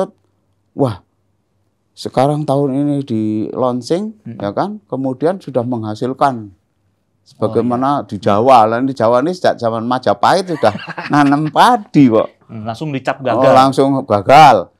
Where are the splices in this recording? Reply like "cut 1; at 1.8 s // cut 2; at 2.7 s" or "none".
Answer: none